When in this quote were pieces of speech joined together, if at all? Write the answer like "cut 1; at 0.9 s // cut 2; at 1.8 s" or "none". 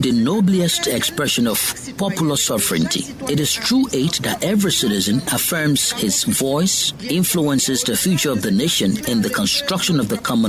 cut 1; at 5.3 s // cut 2; at 9.0 s